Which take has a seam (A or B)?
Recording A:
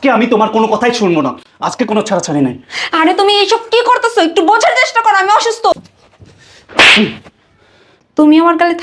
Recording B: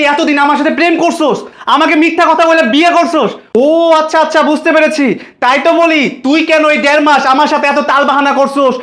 A